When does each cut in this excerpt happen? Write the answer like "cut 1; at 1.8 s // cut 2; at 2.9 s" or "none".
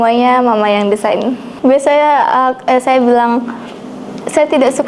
cut 1; at 1.5 s